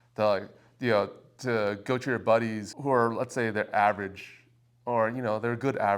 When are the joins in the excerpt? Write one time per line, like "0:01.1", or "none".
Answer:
0:02.7